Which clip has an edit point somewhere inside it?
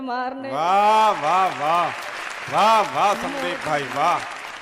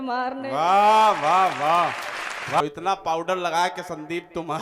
second; 1 cut; at 2.6 s

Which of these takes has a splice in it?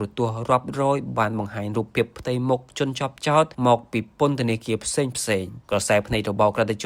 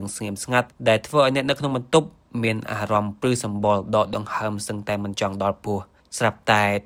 first; 2 cuts; at 3.5 s, 5.5 s

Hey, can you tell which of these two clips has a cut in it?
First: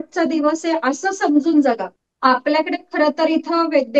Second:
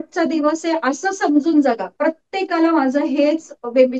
first; 1 cut; at 1.9 s

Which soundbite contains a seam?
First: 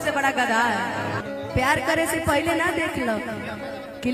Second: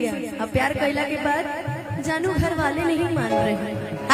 first; 1 cut; at 1.2 s

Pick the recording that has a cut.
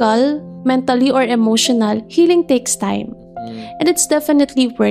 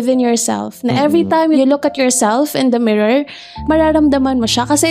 second; 2 cuts; at 1.6 s, 3.5 s

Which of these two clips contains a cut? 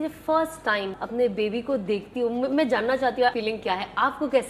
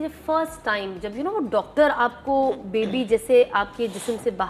first; 2 cuts; at 1.0 s, 3.4 s

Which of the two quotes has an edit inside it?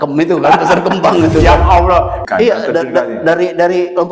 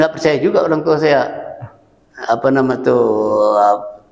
first; 1 cut; at 2.2 s

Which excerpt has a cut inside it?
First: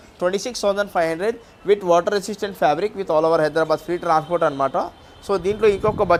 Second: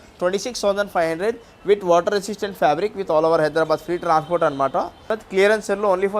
second; 1 cut; at 5.1 s

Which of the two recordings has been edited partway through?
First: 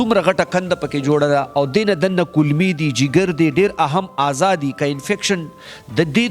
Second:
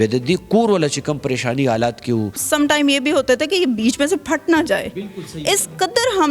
second; 1 cut; at 2.4 s

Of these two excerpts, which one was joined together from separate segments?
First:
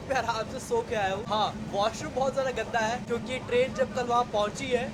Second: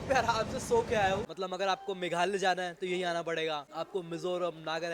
second; 2 cuts; at 1.2 s, 3.7 s

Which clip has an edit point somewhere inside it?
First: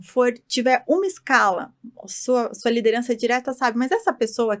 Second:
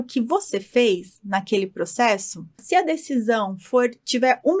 second; 1 cut; at 2.6 s

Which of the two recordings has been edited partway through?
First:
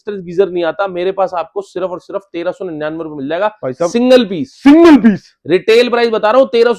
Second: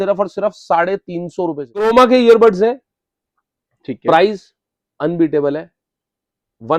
second; 1 cut; at 1.8 s

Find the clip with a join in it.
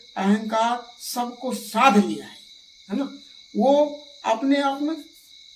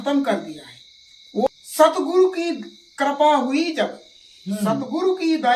second; 1 cut; at 1.5 s

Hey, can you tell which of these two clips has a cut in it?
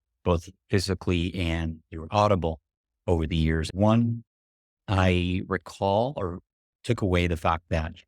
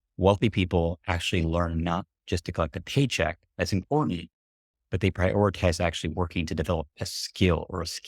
first; 1 cut; at 3.7 s

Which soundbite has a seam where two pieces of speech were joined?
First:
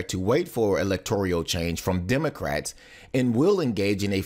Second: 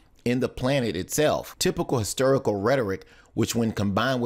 second; 1 cut; at 2.3 s

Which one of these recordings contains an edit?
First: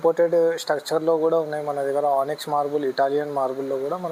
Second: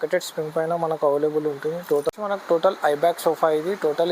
second; 1 cut; at 2.1 s

